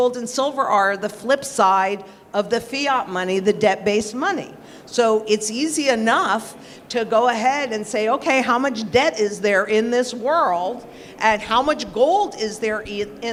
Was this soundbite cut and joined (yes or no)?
no